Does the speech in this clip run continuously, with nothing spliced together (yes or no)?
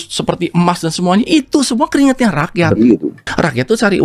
yes